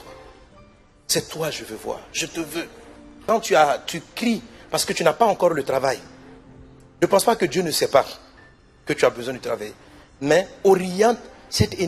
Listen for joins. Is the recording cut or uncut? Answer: cut